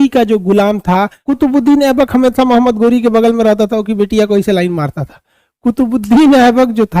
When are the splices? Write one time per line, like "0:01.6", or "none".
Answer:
0:01.2